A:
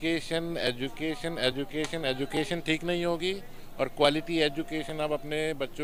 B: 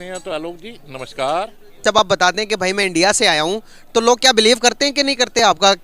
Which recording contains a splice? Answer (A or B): B